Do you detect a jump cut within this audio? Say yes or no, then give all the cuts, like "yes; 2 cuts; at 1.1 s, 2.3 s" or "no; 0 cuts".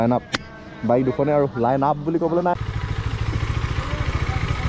yes; 1 cut; at 2.5 s